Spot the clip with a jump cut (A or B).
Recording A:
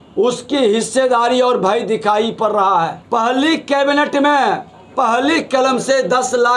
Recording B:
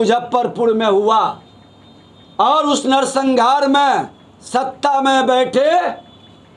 A